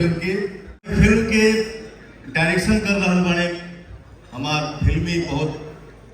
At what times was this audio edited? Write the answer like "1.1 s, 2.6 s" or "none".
0.9 s